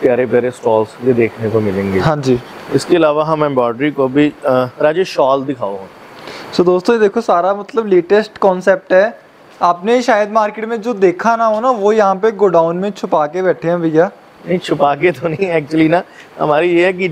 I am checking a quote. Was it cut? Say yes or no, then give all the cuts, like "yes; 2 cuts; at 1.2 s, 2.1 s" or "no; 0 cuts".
no; 0 cuts